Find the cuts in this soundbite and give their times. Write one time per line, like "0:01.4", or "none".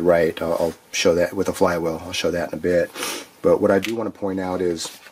0:03.7

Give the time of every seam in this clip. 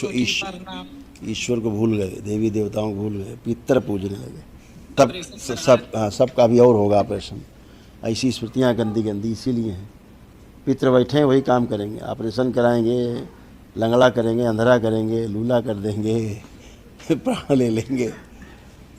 0:04.9

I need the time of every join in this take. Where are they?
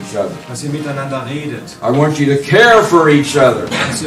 none

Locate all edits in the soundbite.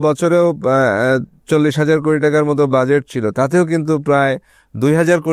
none

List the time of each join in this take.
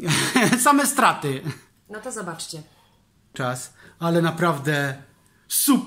0:03.3

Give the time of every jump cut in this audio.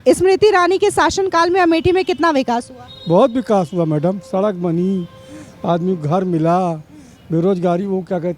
none

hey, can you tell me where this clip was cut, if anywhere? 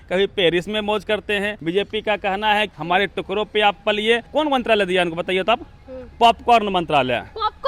0:01.5
0:02.8
0:04.3

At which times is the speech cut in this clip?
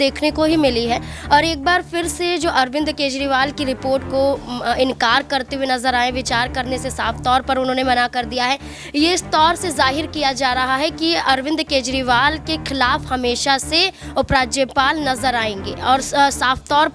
none

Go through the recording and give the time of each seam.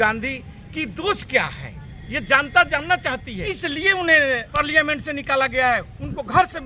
0:03.3
0:04.6

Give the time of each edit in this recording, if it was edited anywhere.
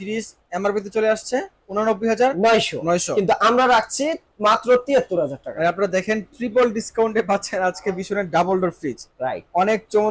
none

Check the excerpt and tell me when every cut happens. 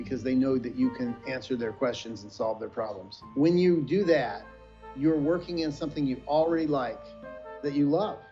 0:03.1

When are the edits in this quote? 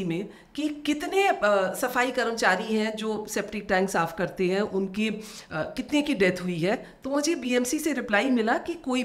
none

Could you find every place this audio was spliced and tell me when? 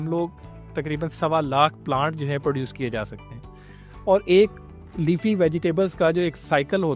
none

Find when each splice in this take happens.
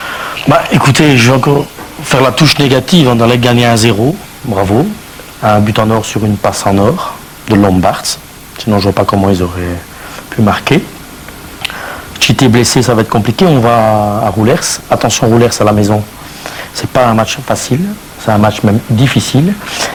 none

